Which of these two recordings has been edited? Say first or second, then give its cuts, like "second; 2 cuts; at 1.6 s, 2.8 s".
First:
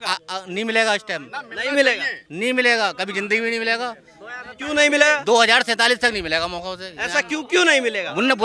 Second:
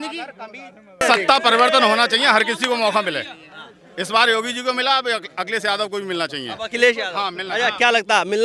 second; 1 cut; at 1.0 s